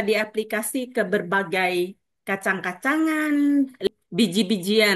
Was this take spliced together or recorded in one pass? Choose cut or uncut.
cut